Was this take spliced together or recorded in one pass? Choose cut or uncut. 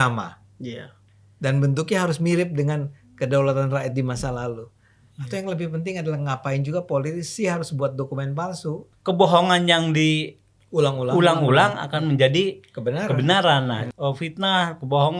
cut